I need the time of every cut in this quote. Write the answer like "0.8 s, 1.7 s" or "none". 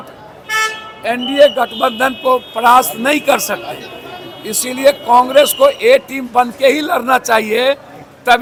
none